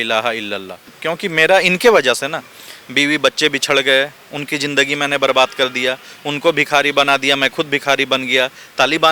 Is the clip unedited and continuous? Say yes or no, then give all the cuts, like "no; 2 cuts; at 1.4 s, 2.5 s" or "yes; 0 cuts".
no; 1 cut; at 1.0 s